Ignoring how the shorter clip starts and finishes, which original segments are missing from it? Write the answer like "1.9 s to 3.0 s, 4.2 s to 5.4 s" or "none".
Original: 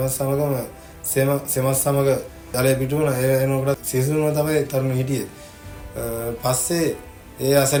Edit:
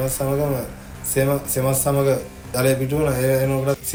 none